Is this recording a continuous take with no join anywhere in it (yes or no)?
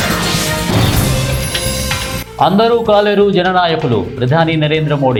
yes